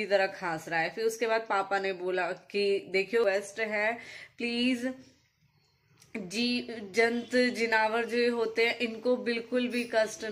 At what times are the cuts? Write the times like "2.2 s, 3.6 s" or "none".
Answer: 3.2 s